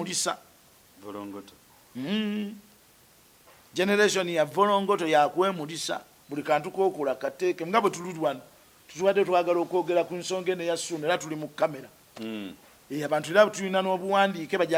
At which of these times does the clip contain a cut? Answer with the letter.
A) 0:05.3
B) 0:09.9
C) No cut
C